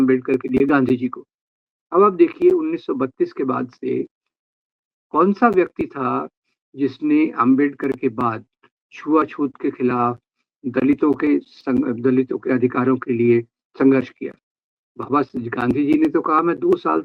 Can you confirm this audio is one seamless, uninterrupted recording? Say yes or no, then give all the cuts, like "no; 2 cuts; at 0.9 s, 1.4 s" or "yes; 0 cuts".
yes; 0 cuts